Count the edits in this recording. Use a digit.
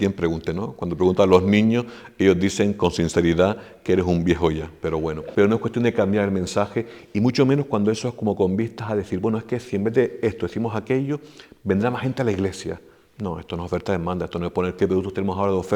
1